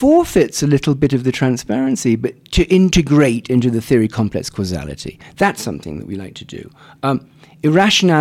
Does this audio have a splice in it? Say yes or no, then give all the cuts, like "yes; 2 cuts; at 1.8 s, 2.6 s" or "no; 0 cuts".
no; 0 cuts